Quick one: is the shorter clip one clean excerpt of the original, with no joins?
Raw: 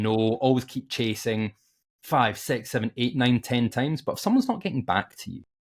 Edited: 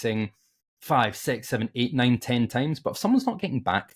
yes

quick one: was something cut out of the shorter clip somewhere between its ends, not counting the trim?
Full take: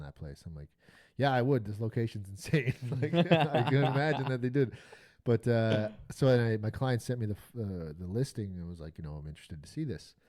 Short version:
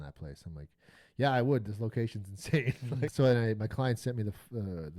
yes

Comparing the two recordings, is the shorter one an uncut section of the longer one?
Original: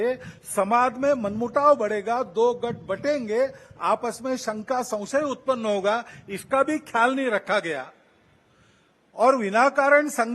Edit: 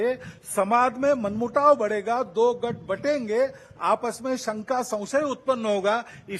yes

